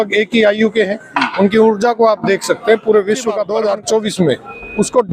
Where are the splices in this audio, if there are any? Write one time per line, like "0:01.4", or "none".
0:03.5